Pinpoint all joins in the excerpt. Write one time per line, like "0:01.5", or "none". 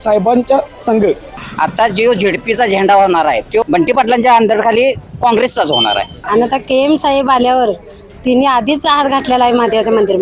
0:01.4
0:03.6
0:06.1